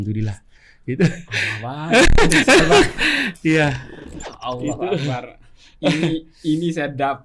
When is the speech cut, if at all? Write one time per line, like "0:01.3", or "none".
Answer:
none